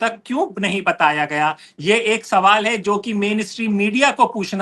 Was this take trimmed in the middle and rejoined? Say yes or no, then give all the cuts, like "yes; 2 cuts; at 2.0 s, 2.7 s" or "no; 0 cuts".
no; 0 cuts